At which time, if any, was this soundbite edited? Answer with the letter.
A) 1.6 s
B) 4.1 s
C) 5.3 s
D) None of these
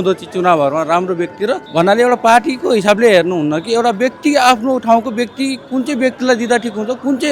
A